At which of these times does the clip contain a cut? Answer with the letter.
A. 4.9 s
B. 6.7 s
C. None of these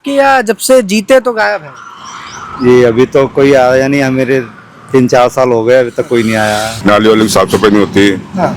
B